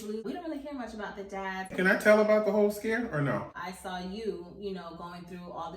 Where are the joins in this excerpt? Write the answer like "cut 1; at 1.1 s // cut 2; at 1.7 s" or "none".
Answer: cut 1; at 1.7 s // cut 2; at 3.6 s